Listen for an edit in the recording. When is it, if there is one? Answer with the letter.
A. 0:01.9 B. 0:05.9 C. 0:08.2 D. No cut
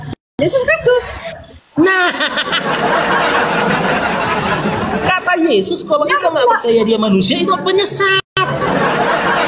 D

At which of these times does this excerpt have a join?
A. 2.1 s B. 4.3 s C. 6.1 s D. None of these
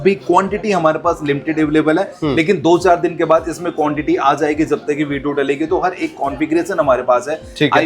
D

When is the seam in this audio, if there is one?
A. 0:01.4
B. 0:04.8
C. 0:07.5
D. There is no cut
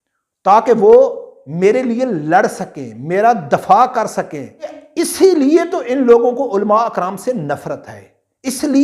B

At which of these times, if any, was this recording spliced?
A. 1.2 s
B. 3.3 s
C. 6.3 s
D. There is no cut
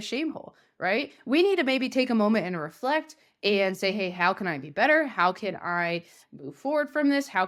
D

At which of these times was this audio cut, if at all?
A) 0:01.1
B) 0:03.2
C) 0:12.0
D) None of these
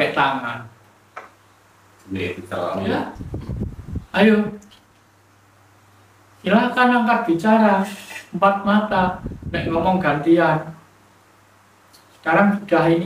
B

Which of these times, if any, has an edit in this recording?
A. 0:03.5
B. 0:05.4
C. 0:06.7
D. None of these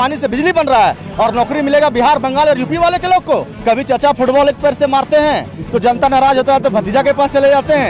A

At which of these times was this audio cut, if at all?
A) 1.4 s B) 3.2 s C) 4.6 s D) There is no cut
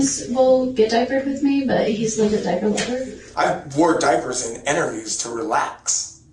B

